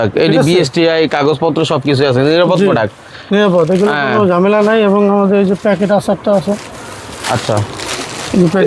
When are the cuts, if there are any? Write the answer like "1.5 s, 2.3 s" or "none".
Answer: none